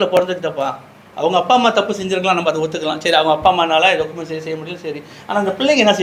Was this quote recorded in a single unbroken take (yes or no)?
yes